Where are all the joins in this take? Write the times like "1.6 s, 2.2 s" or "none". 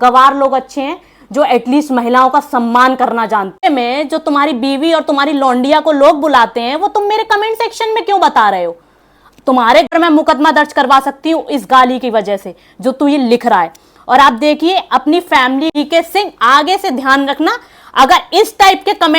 3.6 s, 9.9 s, 15.7 s